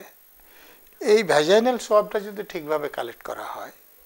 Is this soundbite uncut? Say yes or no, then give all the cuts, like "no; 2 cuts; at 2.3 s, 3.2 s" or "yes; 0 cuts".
yes; 0 cuts